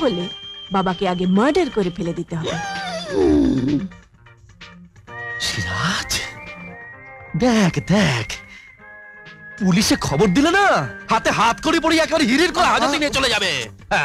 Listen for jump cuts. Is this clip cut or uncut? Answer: uncut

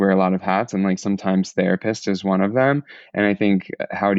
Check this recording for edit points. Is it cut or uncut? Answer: uncut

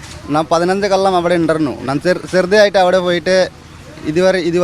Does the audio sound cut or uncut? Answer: uncut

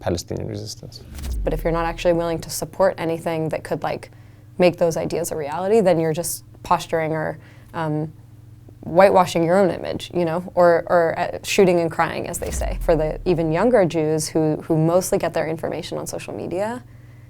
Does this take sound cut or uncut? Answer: cut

